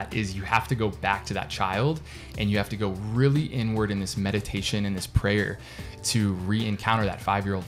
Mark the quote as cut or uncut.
uncut